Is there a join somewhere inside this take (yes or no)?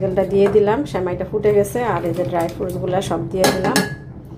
no